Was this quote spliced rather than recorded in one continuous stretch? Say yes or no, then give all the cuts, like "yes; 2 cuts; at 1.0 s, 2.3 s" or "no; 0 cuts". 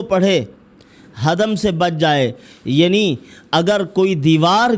no; 0 cuts